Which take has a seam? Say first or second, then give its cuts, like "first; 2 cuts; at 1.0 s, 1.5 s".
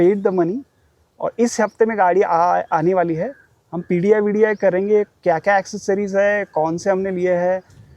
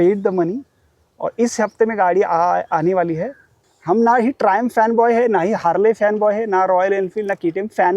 second; 1 cut; at 3.7 s